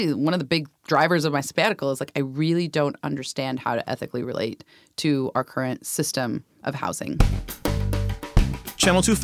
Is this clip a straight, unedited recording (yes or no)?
no